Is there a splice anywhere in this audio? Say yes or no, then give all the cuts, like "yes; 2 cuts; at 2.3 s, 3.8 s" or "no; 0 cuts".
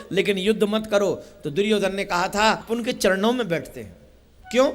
yes; 1 cut; at 2.6 s